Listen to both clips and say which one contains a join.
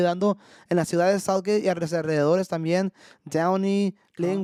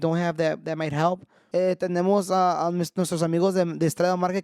second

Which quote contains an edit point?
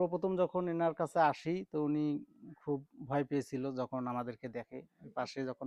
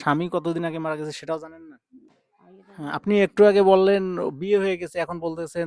second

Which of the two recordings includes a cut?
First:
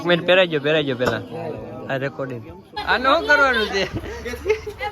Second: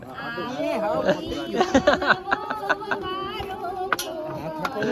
first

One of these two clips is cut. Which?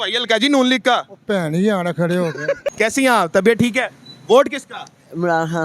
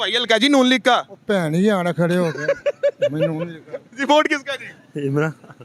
first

